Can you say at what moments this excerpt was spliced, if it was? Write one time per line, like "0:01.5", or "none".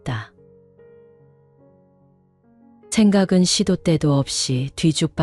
none